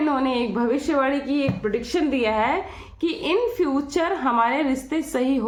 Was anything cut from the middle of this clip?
no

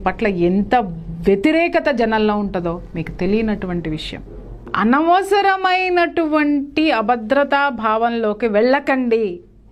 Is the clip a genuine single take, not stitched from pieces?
no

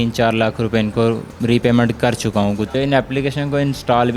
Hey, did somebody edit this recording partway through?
yes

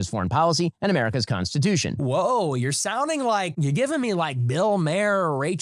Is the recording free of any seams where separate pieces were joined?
no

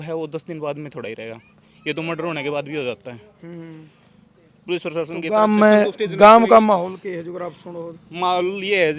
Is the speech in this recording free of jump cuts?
yes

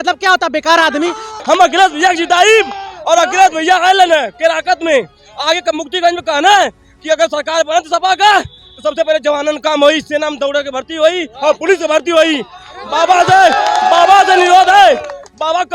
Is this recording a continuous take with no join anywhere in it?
no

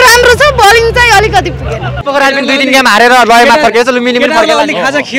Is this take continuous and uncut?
no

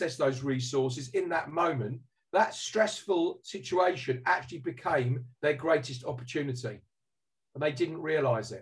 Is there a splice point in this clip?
no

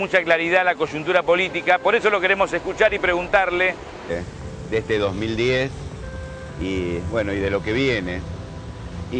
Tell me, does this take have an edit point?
no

